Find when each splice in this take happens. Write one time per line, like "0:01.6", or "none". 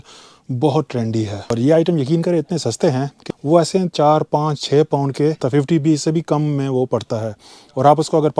0:01.6
0:03.1
0:05.4